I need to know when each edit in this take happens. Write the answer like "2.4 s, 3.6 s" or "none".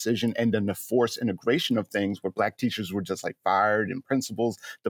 none